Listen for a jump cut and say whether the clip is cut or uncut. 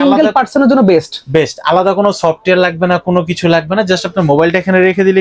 uncut